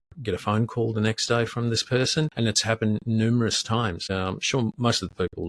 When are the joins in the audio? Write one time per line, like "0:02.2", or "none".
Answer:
0:02.3
0:04.0

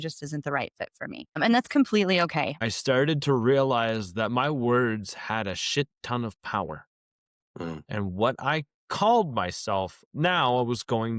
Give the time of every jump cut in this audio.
0:01.4
0:02.6
0:10.0

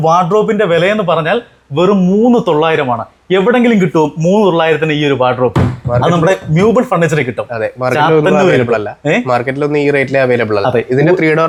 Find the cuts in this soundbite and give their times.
none

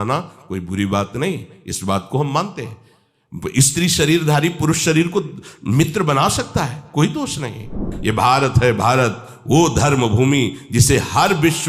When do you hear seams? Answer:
0:07.9

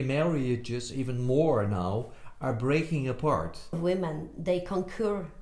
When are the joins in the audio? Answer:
0:03.8

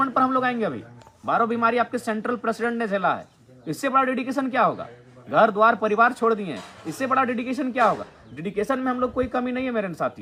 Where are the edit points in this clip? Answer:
none

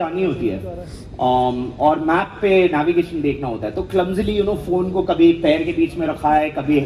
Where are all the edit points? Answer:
none

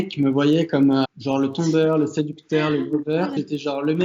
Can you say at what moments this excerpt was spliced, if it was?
0:01.2
0:03.4

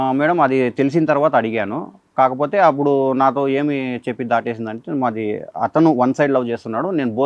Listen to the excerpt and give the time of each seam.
none

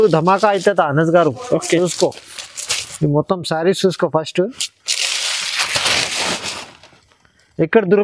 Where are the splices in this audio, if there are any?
none

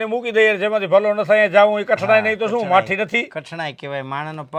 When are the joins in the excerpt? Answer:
none

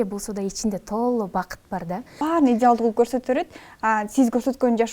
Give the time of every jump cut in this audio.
0:02.1

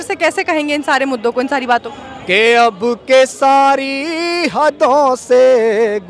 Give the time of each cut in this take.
0:01.9

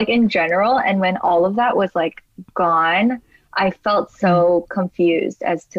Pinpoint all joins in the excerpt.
none

